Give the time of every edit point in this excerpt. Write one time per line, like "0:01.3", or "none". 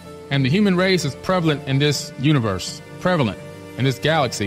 0:02.1